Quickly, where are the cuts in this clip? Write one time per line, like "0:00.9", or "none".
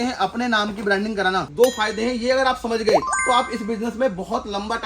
0:01.5